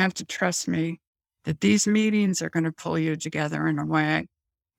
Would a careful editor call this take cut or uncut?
uncut